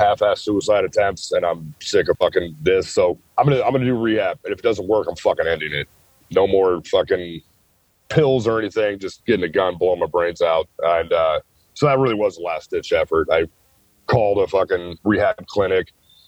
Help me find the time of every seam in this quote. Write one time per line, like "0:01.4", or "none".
0:02.2
0:03.2